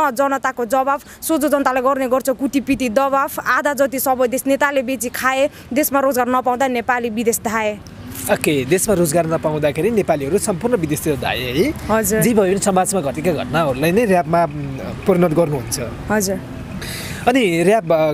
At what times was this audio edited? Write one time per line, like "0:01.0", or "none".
none